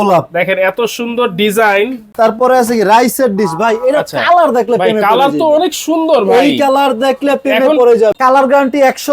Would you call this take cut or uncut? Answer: cut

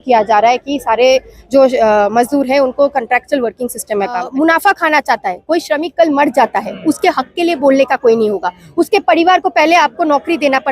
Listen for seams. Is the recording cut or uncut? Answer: cut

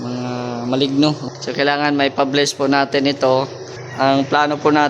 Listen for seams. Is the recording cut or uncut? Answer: cut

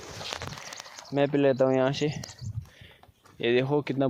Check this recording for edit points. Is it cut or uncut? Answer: uncut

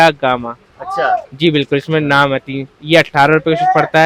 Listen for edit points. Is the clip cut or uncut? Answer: uncut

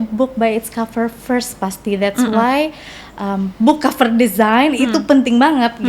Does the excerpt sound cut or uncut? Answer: uncut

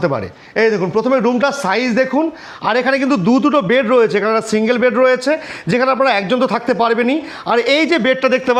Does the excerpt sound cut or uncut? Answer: uncut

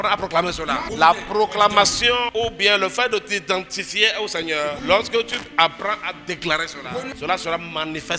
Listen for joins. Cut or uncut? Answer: cut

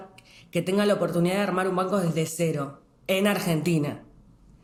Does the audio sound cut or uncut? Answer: uncut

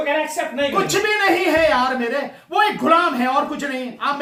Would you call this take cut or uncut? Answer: uncut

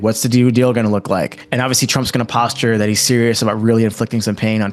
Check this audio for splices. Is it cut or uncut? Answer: cut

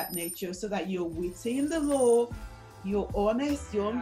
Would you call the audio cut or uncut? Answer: uncut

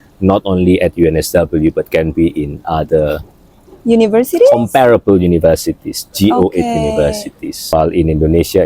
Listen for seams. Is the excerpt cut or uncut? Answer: cut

